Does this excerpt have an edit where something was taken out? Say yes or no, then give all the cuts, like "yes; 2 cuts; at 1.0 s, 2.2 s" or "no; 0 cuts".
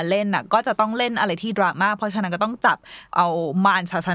yes; 1 cut; at 3.1 s